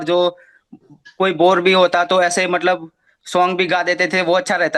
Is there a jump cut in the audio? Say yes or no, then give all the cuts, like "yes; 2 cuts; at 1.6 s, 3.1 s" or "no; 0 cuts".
no; 0 cuts